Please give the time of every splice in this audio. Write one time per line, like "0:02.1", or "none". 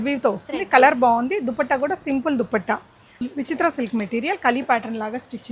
0:03.2